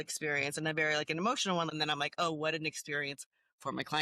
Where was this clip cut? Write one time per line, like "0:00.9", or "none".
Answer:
0:01.7